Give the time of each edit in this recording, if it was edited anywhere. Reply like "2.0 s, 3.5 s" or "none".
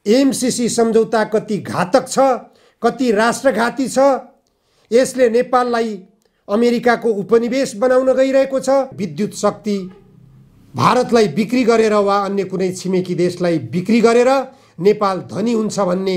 9.0 s